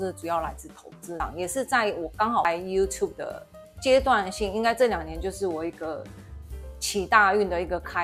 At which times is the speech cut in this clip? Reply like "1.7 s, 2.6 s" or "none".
1.1 s